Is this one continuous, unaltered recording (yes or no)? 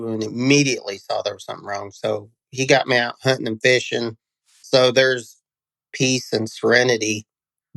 no